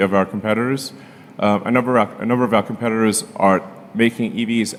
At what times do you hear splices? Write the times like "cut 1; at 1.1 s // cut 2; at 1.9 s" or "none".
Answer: none